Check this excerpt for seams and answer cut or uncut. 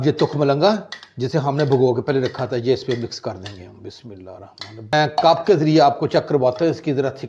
cut